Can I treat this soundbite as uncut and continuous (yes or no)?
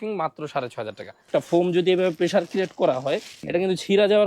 no